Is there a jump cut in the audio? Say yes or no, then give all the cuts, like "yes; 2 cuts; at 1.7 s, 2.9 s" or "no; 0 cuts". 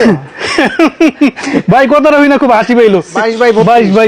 yes; 1 cut; at 3.1 s